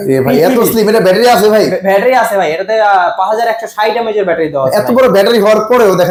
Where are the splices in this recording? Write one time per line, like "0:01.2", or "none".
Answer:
none